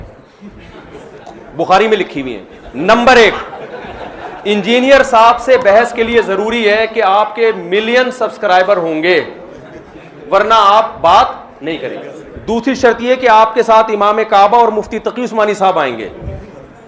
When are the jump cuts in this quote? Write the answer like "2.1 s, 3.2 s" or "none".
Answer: none